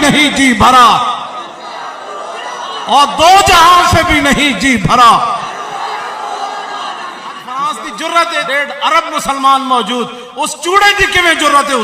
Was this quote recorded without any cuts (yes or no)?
no